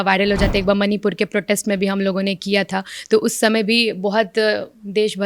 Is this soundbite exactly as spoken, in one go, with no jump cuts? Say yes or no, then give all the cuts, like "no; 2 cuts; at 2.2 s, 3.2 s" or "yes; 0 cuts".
yes; 0 cuts